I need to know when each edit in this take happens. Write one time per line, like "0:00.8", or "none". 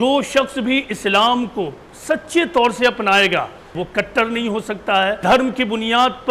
0:03.8
0:05.2